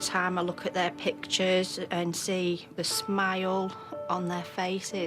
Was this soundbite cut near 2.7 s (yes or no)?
yes